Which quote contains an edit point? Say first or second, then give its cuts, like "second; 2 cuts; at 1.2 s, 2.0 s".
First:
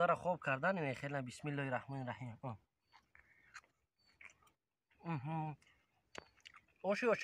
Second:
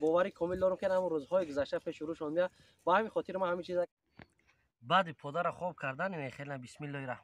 second; 1 cut; at 3.9 s